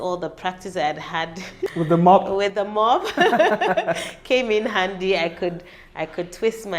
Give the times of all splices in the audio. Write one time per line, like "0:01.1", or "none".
0:01.7